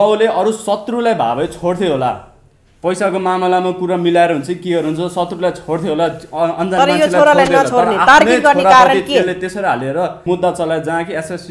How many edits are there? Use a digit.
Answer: 1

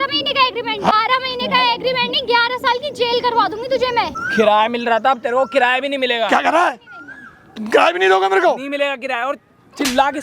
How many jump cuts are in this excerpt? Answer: 2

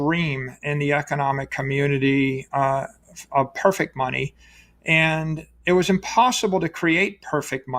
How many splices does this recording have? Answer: 0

